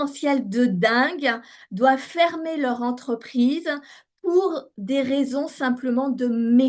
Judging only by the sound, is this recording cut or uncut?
uncut